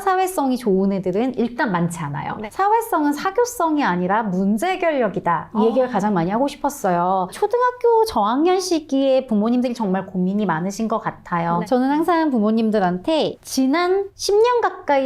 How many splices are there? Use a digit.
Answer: 2